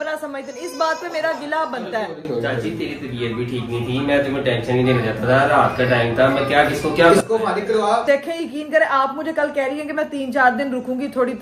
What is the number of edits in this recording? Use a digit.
0